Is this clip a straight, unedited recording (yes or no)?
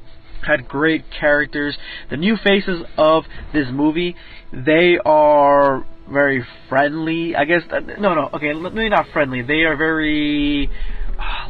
no